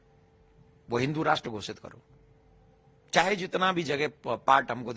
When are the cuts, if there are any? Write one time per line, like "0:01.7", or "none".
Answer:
none